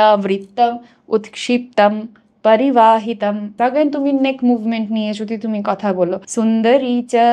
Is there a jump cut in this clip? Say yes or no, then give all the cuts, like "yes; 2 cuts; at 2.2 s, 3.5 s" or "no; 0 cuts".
yes; 2 cuts; at 3.5 s, 6.2 s